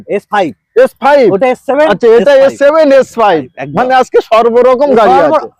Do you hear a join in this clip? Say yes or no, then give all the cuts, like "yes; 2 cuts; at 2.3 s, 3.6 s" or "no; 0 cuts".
no; 0 cuts